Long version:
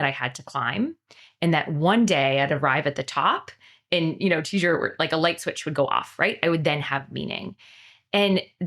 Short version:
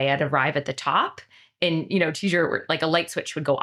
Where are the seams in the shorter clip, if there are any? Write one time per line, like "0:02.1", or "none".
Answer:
none